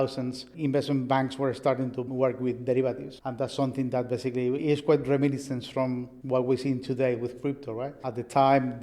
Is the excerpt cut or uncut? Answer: cut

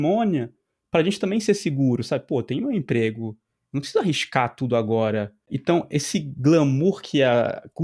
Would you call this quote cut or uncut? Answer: cut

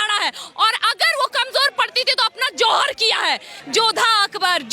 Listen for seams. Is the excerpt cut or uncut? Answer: cut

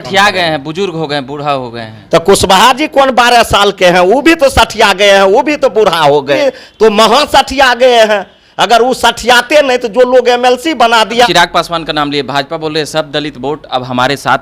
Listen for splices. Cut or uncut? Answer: cut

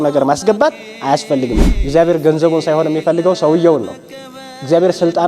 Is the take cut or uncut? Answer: cut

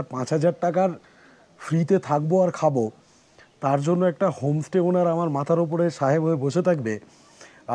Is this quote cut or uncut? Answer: uncut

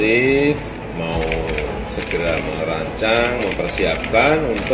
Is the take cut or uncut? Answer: uncut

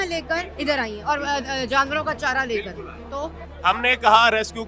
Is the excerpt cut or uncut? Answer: cut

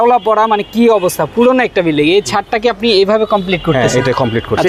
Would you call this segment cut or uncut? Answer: uncut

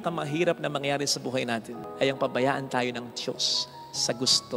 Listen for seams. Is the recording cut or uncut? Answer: uncut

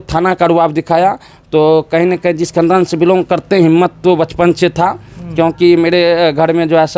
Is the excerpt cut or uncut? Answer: uncut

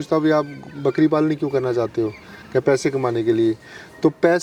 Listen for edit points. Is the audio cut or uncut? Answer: uncut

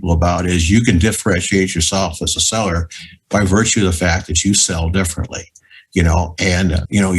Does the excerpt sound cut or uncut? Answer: uncut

